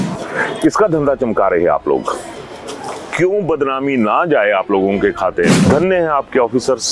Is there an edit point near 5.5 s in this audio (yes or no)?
yes